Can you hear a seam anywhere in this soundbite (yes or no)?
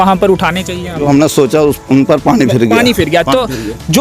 yes